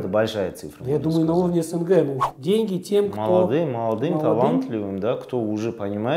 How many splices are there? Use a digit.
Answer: 1